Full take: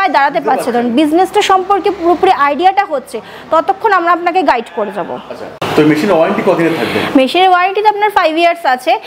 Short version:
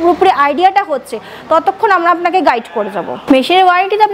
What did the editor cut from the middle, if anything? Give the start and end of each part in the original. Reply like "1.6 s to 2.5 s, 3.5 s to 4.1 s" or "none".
5.2 s to 7.1 s

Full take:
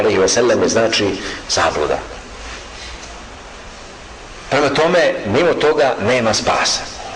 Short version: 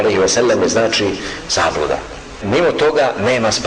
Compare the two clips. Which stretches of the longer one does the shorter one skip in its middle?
2.4 s to 5.2 s

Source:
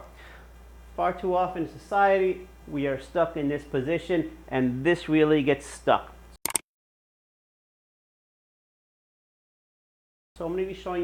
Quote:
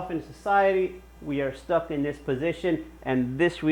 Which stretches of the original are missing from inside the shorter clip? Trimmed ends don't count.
none

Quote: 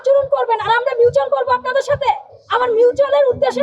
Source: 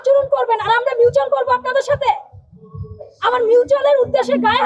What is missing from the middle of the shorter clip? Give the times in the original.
2.3 s to 3.1 s

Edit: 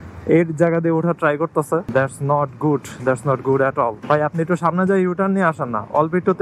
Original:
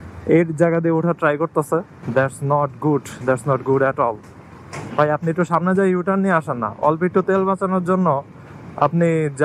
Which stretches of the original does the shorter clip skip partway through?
1.9 s to 2.1 s, 4.2 s to 4.9 s

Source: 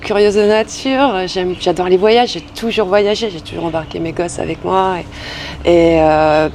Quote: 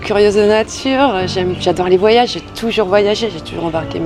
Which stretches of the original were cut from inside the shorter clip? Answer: none

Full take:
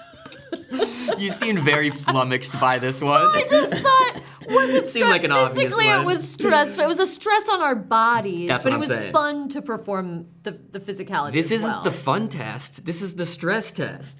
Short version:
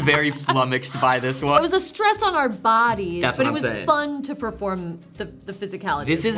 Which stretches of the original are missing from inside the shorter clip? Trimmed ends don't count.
3.2 s to 6.9 s

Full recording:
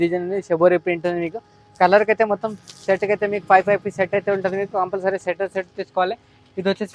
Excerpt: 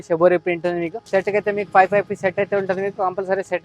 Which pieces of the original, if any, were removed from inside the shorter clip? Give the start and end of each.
1.3 s to 2.7 s

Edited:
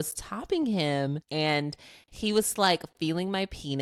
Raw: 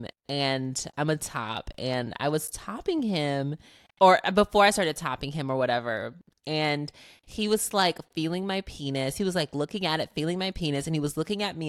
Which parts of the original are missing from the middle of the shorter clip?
3.6 s to 6.4 s

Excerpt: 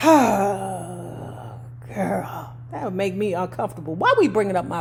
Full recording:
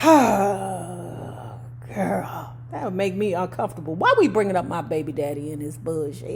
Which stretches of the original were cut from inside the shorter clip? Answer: none

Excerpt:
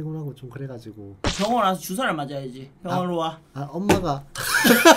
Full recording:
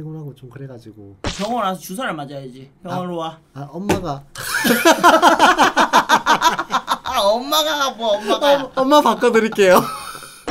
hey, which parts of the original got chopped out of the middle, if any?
none

